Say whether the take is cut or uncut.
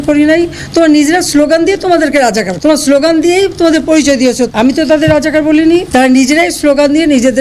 cut